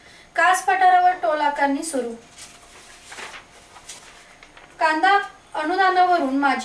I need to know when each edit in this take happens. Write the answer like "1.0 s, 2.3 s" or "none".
4.3 s